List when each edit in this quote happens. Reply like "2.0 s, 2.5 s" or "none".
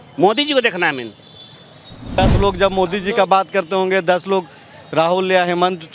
2.2 s

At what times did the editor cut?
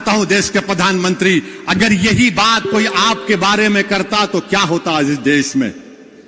none

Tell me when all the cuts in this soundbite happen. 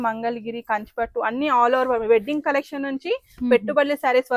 none

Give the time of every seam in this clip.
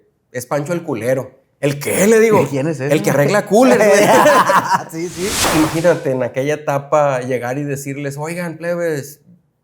5.4 s

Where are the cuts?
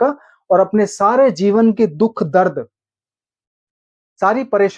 none

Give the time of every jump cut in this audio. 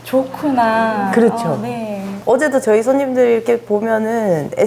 none

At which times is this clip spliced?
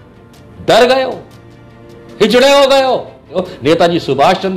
3.3 s

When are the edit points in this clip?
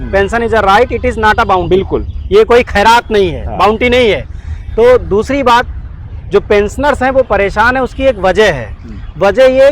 none

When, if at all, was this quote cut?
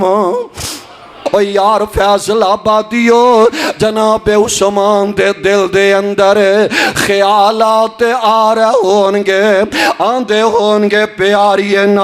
1.3 s

